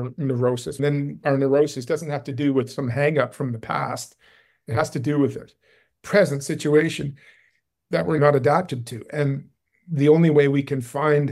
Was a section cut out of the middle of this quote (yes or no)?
yes